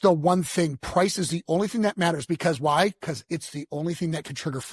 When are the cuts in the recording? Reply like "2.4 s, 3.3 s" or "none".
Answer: none

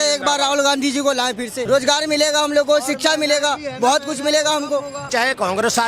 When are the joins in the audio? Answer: 1.6 s, 5.0 s

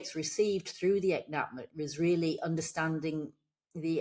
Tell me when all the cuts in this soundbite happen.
1.6 s

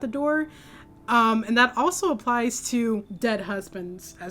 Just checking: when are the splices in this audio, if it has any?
3.1 s

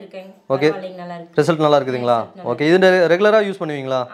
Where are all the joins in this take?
none

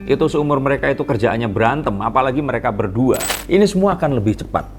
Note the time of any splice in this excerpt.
3.3 s

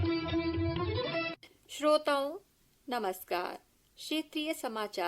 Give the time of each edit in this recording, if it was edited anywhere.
1.5 s

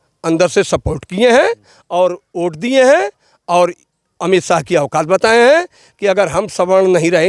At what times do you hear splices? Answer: none

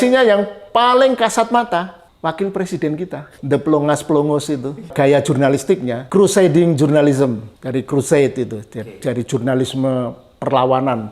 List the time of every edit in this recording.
2.0 s, 3.3 s, 4.9 s, 6.0 s, 7.5 s

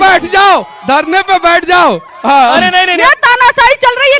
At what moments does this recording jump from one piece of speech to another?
2.8 s

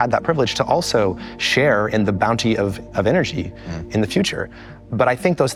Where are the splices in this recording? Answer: none

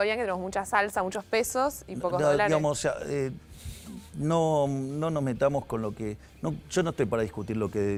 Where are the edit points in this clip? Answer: none

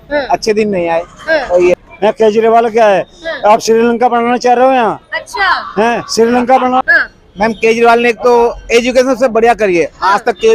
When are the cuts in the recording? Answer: 1.8 s, 6.9 s

